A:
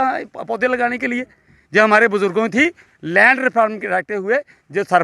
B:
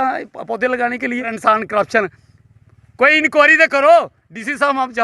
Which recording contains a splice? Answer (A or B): B